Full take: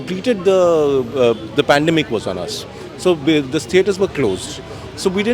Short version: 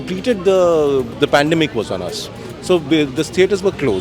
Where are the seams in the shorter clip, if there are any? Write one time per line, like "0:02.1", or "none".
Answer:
0:01.1